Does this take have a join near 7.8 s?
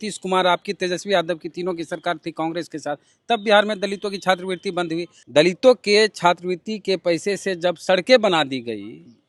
no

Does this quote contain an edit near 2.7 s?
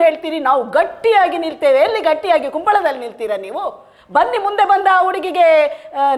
no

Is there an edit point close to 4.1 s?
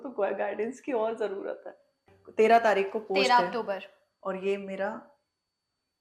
no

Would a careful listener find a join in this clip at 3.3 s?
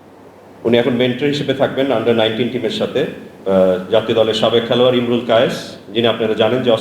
yes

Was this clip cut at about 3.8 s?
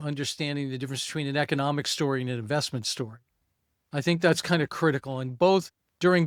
no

